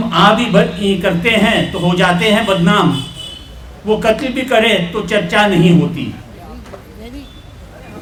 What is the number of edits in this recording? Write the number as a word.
zero